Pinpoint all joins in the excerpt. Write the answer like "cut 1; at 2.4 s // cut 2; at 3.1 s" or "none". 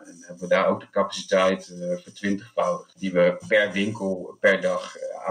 cut 1; at 2.9 s